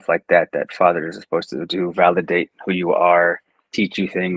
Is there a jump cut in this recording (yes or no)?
no